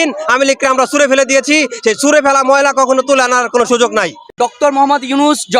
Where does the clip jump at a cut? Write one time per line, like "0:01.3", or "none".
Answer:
0:04.3

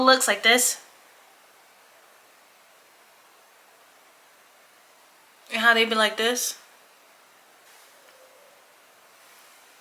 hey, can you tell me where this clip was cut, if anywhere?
0:05.4
0:07.7

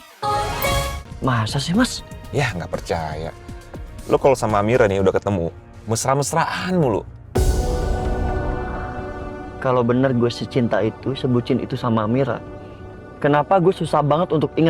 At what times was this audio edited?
0:01.0

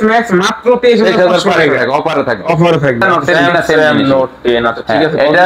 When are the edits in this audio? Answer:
0:03.2

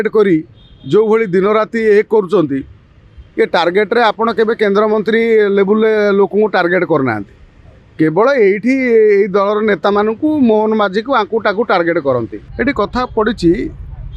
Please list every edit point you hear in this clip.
0:12.4

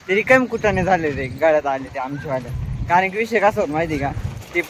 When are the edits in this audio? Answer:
none

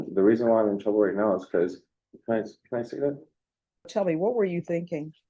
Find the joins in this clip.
0:03.9

